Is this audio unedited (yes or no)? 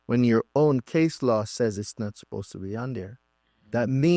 yes